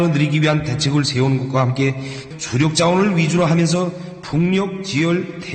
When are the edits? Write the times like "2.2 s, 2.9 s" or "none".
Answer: none

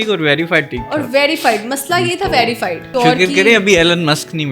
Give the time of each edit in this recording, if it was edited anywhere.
2.8 s

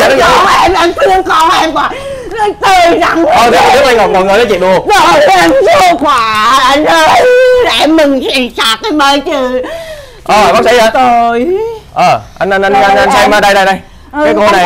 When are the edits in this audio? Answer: none

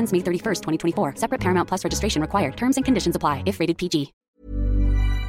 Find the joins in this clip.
4.2 s

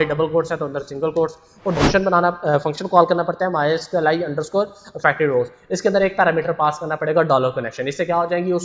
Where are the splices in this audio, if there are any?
1.8 s

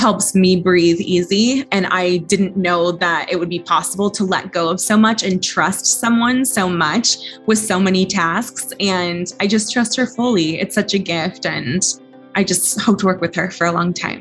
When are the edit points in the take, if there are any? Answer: 1.7 s

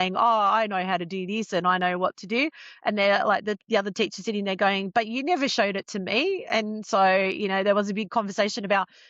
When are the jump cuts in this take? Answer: none

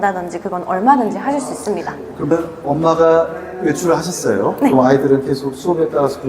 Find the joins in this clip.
2.2 s

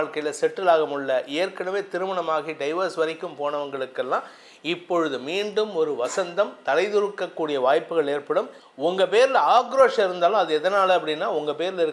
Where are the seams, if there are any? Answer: 8.6 s

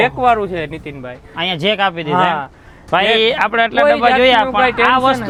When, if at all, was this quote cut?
none

